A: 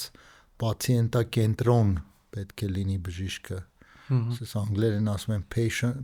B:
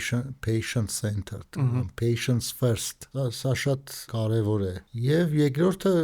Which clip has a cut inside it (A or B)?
B